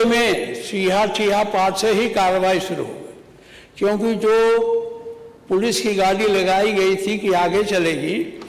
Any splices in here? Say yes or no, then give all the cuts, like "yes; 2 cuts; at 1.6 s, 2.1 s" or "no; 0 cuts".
no; 0 cuts